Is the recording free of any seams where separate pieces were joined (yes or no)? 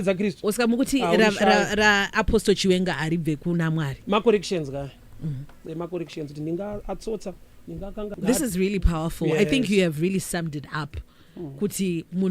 no